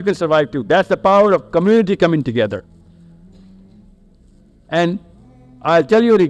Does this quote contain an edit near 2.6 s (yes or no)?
no